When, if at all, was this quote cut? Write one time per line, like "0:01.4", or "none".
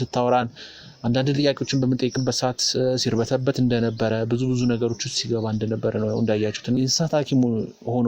0:06.8